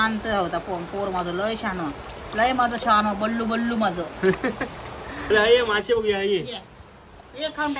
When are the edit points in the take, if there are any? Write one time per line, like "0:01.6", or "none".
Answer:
0:05.3